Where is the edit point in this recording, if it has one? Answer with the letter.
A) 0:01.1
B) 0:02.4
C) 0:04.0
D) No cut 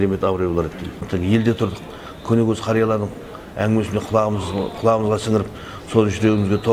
A